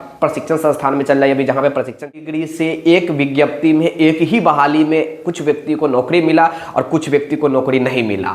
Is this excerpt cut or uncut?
cut